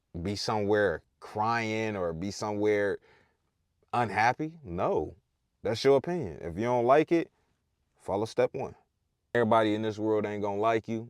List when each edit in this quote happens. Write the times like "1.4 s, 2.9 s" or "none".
9.3 s